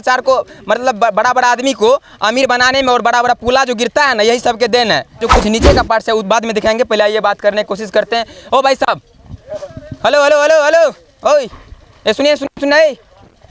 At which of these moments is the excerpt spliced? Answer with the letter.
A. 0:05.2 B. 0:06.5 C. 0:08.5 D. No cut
A